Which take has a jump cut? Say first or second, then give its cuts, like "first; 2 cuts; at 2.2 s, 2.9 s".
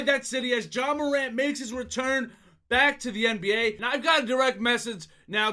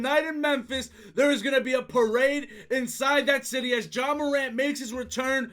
first; 1 cut; at 3.8 s